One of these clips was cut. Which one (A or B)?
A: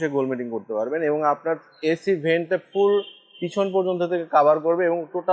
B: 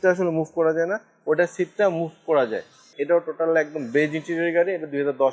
B